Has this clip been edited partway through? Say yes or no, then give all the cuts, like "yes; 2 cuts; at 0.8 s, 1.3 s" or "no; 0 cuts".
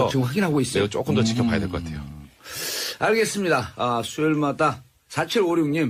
no; 0 cuts